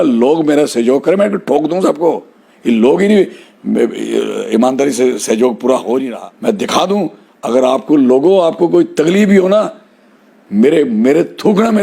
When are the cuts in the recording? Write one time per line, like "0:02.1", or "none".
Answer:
0:06.1